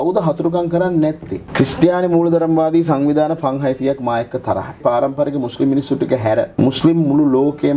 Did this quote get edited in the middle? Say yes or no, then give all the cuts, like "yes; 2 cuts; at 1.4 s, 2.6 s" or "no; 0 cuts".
yes; 3 cuts; at 1.4 s, 4.8 s, 6.5 s